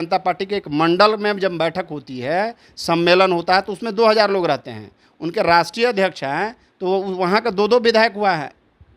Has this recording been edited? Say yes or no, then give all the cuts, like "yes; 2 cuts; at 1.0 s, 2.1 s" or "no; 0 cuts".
no; 0 cuts